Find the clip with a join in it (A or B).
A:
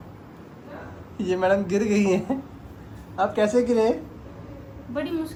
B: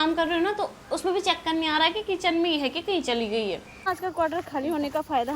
B